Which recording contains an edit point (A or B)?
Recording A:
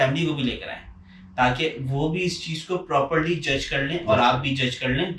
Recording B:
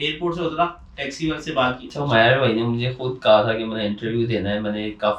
B